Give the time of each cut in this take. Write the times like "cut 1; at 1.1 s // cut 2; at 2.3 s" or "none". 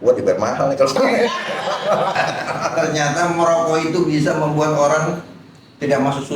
cut 1; at 2.7 s